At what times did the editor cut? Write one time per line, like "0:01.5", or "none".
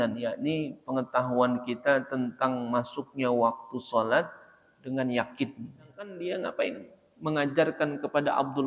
0:06.1